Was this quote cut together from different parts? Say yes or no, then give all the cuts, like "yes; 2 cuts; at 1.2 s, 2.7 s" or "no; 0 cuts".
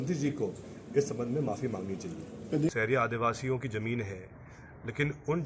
yes; 1 cut; at 2.7 s